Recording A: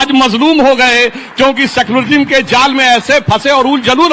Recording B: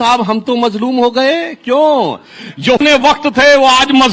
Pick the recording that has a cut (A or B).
B